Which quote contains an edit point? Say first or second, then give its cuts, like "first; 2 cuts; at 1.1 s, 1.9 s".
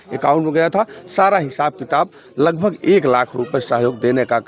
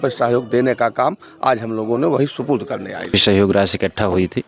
second; 1 cut; at 3.1 s